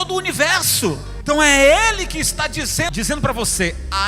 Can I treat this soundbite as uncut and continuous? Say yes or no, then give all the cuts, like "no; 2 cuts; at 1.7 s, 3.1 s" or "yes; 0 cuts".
no; 2 cuts; at 1.1 s, 2.9 s